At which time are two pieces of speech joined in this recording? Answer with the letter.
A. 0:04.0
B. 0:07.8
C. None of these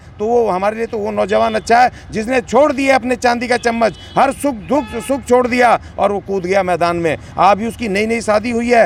C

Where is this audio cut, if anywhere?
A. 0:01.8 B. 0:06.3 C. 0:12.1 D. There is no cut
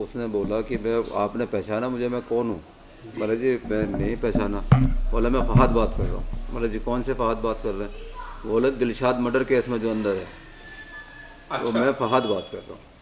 D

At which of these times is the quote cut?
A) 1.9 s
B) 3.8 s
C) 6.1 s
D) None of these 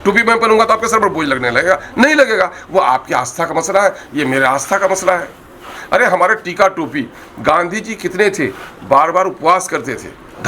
D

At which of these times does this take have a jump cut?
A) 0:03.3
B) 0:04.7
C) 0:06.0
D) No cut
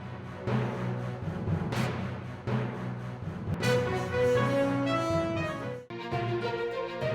C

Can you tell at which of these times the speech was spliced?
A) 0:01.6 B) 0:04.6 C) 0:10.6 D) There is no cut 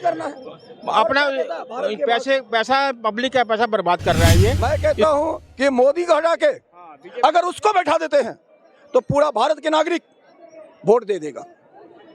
B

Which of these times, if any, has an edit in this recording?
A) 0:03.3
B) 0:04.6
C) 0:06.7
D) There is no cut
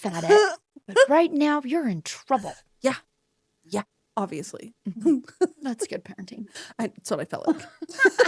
D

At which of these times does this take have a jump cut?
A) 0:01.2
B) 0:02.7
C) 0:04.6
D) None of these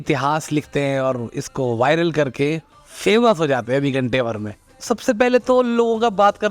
C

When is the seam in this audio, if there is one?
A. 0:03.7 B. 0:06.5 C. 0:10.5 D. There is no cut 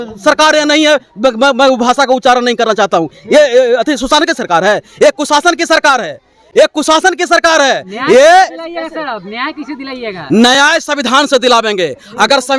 D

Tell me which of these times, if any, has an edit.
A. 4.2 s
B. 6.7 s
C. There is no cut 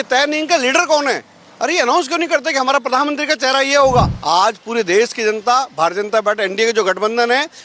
A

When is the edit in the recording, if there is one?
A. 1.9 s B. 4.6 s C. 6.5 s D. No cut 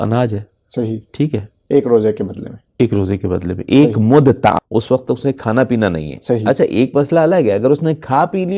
B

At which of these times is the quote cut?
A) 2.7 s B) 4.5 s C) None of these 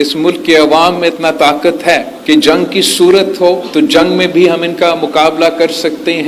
C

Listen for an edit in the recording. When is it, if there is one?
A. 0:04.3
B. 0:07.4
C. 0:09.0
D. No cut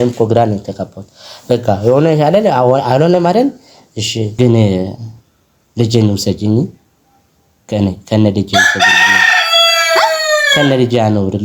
A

